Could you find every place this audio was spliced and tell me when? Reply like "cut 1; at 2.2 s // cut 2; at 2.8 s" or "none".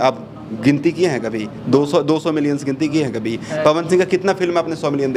none